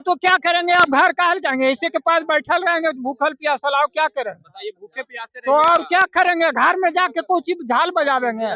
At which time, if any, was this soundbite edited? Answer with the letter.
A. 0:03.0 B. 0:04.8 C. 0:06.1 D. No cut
D